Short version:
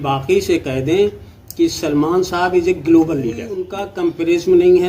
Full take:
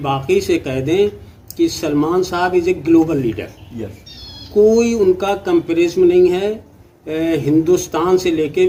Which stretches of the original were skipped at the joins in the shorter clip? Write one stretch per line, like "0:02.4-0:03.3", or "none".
0:03.8-0:05.3